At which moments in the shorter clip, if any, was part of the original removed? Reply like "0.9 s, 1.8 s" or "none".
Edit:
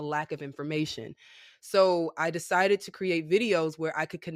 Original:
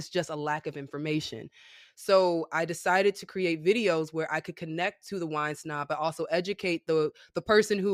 none